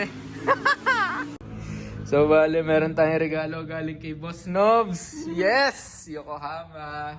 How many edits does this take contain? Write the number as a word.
one